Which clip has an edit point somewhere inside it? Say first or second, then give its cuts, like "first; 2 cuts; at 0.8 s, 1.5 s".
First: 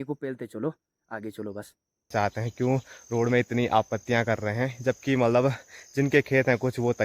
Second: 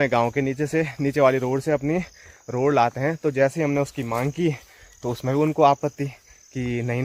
first; 1 cut; at 2.1 s